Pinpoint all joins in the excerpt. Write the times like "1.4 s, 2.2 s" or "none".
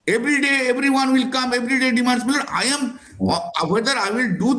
none

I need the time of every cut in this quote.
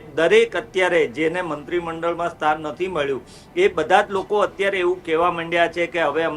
none

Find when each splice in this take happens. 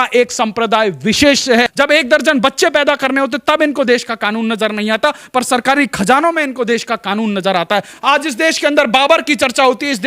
1.7 s, 8.0 s

